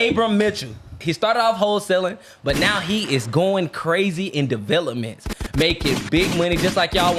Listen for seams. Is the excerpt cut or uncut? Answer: cut